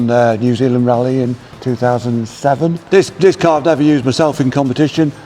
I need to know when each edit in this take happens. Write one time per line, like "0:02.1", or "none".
0:02.8